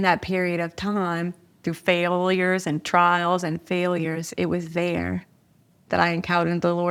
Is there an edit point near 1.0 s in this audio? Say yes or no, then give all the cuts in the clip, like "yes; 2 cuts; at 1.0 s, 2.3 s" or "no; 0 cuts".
no; 0 cuts